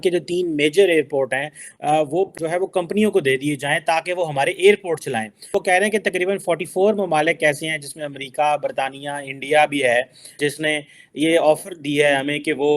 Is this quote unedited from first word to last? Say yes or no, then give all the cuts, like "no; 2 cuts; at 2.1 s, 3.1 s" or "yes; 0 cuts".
no; 2 cuts; at 2.3 s, 5.3 s